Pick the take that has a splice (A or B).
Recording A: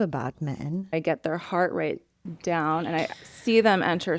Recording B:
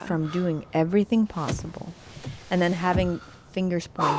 A